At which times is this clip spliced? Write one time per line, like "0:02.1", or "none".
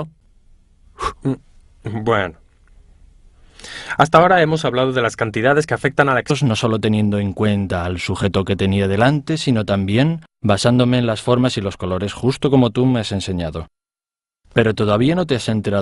none

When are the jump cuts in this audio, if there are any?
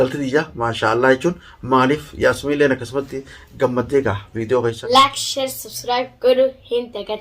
0:04.8

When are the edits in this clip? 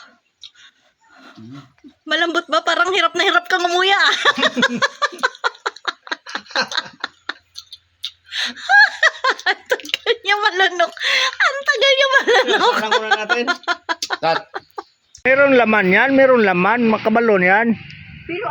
0:15.3

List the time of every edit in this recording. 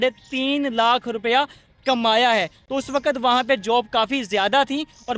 none

